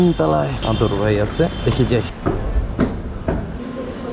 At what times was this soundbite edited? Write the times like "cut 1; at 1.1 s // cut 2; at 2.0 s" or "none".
none